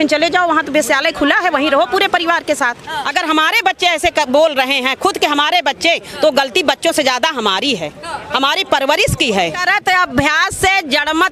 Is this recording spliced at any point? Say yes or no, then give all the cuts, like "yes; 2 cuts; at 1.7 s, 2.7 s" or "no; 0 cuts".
yes; 2 cuts; at 3.0 s, 9.6 s